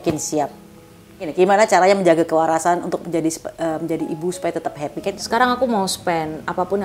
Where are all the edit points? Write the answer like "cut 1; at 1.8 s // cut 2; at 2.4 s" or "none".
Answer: cut 1; at 1.3 s // cut 2; at 5.1 s